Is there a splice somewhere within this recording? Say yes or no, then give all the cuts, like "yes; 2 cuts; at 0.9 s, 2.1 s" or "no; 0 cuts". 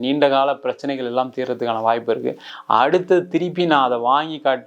yes; 1 cut; at 2.5 s